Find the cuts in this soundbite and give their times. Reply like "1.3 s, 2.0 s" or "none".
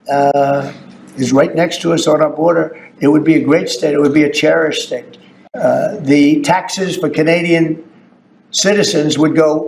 none